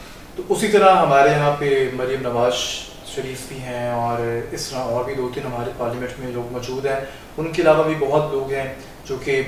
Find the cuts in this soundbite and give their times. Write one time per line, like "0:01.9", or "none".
none